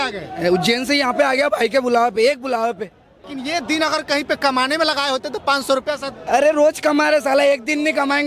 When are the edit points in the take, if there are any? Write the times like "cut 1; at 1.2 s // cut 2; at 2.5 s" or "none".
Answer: cut 1; at 3.3 s